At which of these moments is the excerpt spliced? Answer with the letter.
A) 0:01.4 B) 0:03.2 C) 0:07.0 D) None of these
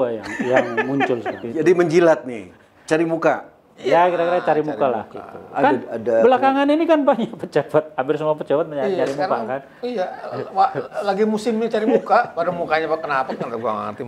A